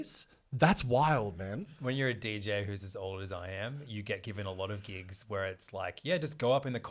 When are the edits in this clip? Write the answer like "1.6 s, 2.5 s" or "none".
1.7 s